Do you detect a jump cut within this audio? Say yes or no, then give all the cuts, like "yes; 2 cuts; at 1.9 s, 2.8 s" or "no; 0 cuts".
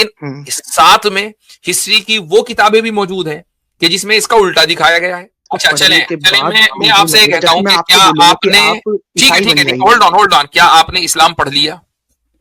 yes; 1 cut; at 5.4 s